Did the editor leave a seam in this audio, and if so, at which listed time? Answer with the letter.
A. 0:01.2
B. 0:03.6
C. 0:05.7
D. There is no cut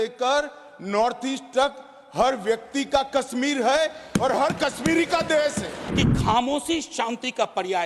C